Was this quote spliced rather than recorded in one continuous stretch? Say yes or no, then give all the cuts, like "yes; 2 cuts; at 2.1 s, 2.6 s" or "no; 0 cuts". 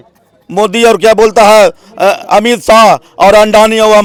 no; 0 cuts